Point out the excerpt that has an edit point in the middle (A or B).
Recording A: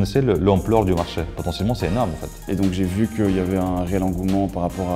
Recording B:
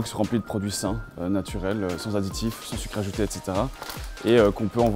A